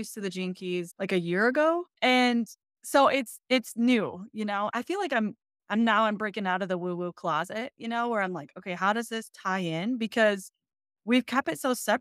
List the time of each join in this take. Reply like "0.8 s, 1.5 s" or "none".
0.9 s, 1.9 s, 4.7 s